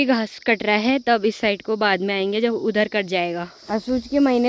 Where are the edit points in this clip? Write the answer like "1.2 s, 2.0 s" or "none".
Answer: none